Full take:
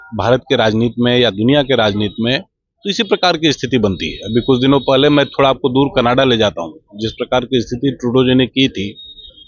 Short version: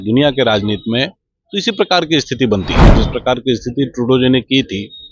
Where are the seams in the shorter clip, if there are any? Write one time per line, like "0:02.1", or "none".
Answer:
0:02.8